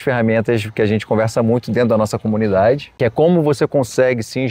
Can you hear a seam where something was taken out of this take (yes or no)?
yes